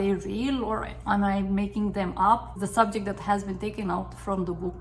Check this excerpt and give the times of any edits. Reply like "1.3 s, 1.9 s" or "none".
2.5 s